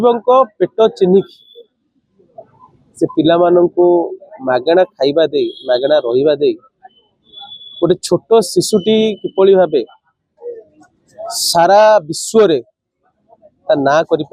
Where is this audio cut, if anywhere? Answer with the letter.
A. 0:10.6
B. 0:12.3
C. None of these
C